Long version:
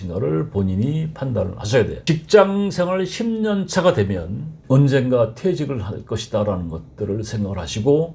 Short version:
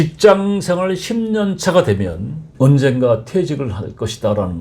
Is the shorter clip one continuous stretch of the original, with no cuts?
yes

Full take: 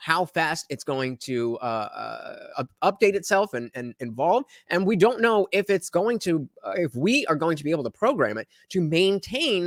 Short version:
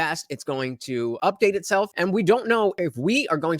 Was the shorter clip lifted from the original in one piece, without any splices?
no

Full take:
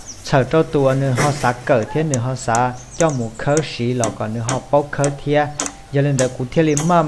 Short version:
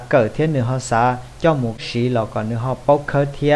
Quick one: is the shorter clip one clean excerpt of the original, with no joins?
no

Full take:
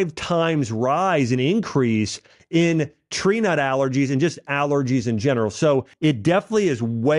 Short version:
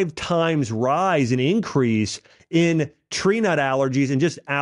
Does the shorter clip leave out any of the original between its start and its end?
no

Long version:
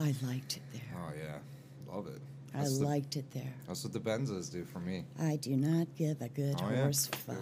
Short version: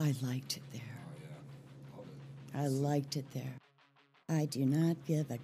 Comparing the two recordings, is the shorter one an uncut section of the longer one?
no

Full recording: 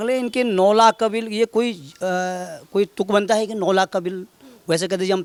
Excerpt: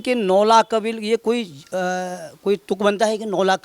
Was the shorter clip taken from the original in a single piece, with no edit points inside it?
yes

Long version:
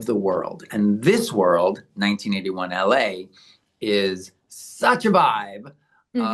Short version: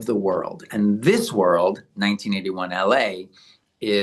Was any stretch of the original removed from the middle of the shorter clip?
no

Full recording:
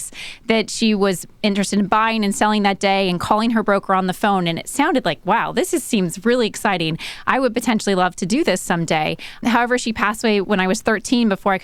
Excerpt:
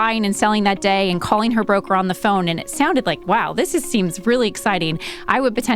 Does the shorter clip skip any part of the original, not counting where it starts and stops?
no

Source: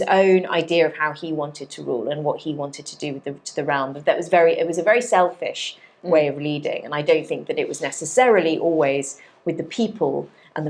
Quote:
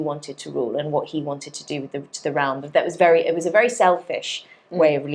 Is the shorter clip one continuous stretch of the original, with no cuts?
yes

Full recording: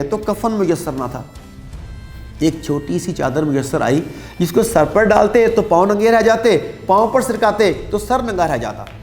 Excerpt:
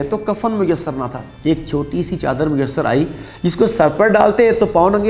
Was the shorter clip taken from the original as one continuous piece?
no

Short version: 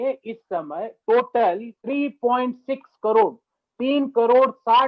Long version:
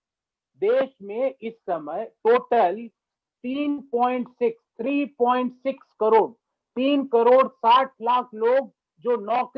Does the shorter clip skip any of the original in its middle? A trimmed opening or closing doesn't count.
yes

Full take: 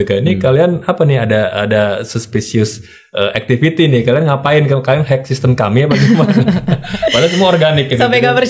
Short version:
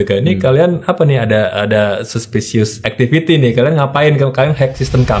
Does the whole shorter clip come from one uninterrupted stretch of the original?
no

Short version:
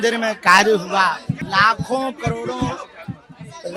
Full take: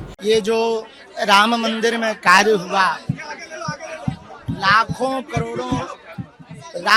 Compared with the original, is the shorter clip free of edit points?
no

